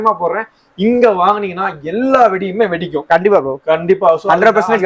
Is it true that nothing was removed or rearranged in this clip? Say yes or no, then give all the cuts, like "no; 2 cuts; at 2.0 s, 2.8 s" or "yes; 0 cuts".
yes; 0 cuts